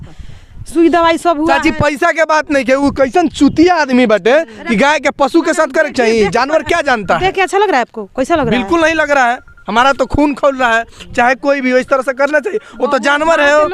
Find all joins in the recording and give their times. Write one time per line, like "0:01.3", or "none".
none

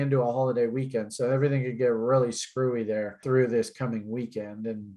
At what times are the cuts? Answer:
0:03.2

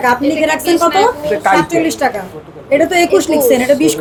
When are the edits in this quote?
none

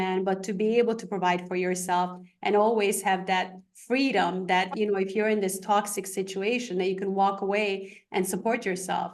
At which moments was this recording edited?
none

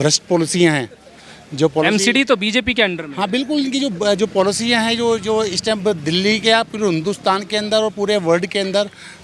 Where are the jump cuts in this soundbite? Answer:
none

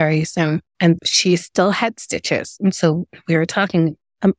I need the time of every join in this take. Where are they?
0:01.0

